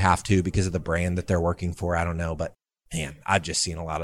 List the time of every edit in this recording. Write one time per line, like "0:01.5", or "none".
none